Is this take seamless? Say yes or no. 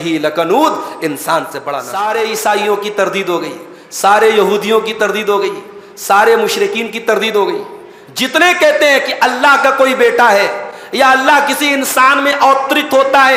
no